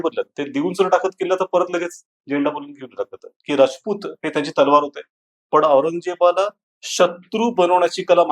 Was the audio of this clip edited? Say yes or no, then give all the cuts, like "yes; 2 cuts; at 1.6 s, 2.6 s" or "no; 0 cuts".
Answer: yes; 1 cut; at 3.4 s